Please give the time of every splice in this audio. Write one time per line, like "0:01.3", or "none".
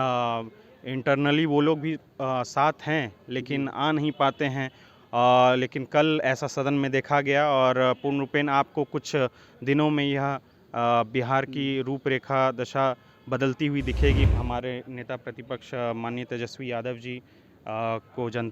0:14.2